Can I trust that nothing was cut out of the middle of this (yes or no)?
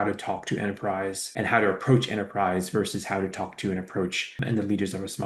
no